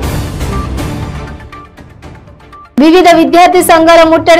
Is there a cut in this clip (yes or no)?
yes